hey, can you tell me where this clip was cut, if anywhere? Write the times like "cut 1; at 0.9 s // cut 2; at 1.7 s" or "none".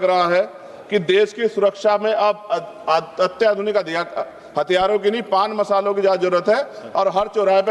none